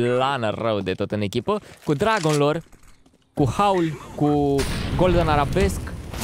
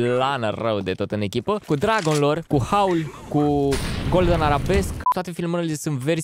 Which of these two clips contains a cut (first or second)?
second